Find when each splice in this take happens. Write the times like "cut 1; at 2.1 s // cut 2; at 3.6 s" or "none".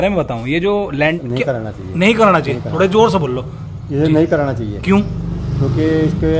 cut 1; at 1.2 s